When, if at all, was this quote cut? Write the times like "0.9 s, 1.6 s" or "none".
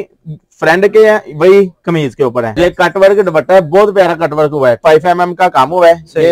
2.5 s, 4.8 s